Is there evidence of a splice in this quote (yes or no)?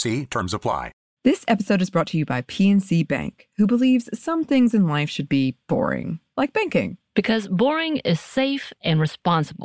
yes